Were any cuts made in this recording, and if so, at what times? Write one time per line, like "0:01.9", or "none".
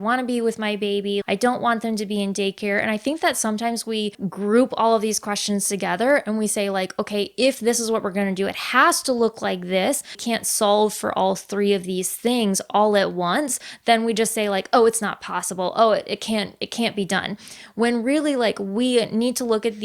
0:01.2
0:04.2
0:10.2